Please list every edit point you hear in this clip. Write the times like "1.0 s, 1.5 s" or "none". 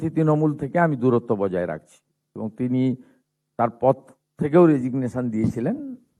none